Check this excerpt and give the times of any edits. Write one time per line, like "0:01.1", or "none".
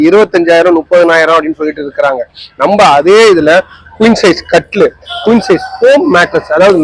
none